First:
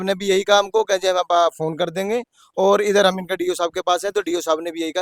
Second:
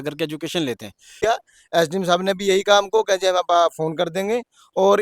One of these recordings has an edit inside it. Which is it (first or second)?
second